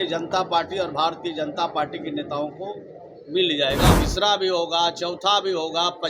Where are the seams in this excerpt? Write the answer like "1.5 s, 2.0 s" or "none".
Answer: 4.0 s